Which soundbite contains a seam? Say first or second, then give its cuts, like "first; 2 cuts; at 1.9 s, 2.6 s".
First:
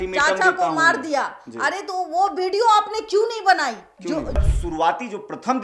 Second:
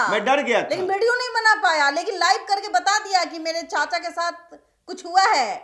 first; 1 cut; at 4.4 s